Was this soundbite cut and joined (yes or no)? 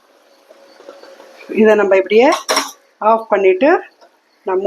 no